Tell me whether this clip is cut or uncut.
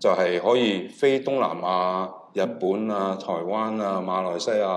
uncut